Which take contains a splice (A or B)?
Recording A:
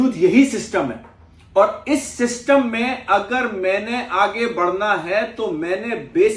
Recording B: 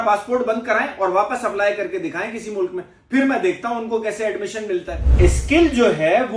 B